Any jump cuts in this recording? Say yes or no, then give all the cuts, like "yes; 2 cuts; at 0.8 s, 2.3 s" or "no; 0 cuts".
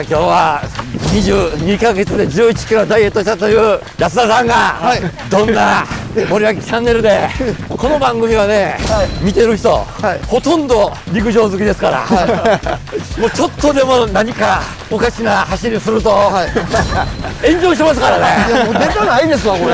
yes; 8 cuts; at 3.9 s, 5.1 s, 6.0 s, 7.6 s, 9.1 s, 10.2 s, 11.0 s, 14.7 s